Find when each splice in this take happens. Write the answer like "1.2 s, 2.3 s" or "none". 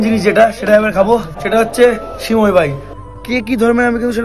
1.3 s, 2.9 s